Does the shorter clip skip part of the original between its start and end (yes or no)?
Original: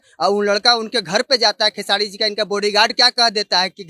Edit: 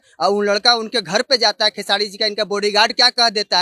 no